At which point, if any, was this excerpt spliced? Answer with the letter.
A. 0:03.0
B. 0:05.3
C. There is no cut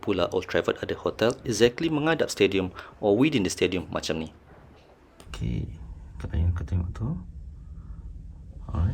B